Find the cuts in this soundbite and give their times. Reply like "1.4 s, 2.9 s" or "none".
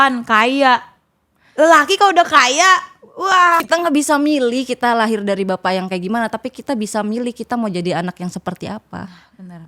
3.6 s